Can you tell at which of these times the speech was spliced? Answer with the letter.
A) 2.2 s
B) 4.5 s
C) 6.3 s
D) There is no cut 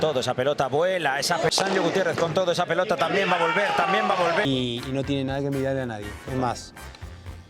B